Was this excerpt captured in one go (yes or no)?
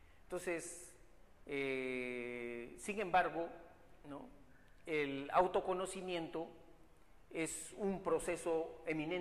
yes